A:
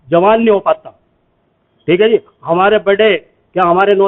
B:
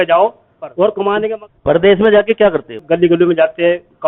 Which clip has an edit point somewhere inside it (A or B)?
B